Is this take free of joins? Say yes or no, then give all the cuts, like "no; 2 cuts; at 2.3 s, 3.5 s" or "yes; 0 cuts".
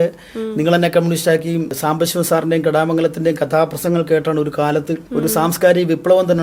no; 2 cuts; at 1.8 s, 5.0 s